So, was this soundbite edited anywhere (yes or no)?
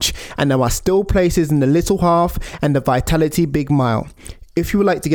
no